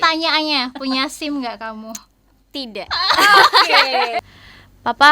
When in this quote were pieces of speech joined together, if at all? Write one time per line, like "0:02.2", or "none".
0:04.2